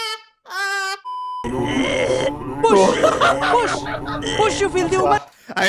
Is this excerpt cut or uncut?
cut